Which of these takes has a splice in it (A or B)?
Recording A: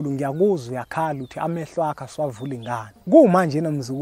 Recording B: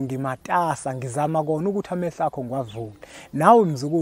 A